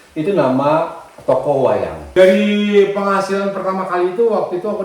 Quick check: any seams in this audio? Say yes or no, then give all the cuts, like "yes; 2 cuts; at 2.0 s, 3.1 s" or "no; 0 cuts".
yes; 1 cut; at 2.0 s